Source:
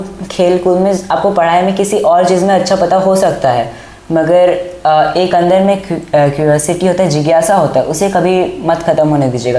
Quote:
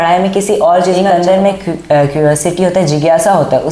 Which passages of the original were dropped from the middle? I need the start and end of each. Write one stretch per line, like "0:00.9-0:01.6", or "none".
0:02.5-0:05.3